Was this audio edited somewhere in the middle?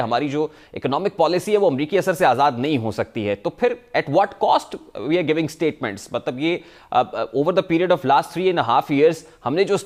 no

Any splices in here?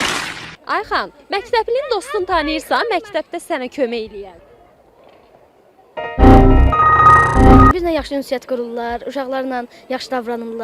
yes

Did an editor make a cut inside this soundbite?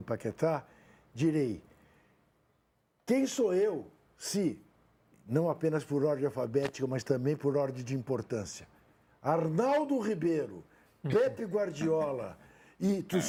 no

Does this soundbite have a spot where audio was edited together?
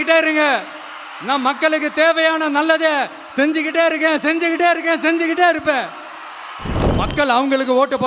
yes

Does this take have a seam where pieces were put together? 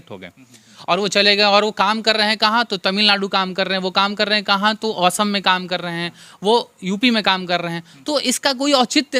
no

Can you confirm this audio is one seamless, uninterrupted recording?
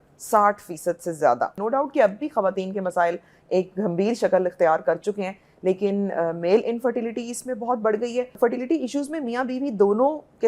no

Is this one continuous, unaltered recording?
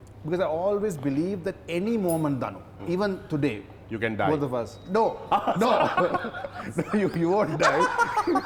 yes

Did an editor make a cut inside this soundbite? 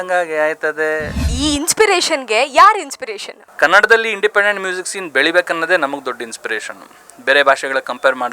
yes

